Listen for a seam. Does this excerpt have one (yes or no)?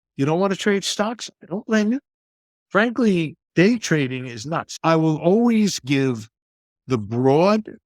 yes